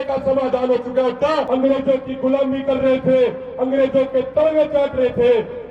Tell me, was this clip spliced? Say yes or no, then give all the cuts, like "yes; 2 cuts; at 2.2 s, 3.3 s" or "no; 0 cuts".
yes; 1 cut; at 1.5 s